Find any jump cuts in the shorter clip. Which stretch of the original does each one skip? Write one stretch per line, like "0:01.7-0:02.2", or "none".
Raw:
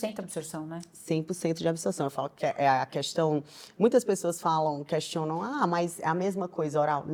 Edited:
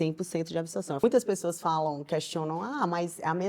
0:02.1-0:03.8